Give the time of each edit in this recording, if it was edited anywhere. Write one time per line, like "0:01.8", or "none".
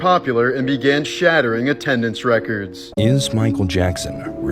0:02.8